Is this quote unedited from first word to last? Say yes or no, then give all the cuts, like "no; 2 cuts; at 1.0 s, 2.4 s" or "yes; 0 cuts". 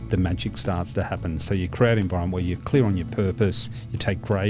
yes; 0 cuts